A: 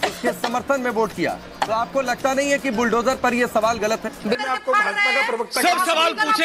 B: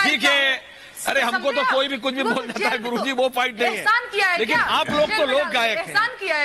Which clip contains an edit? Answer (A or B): A